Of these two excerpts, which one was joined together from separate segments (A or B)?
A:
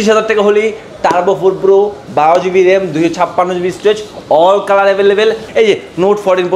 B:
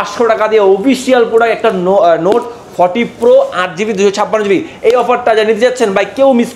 A